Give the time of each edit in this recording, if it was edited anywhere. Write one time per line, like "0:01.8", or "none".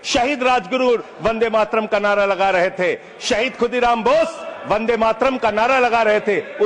none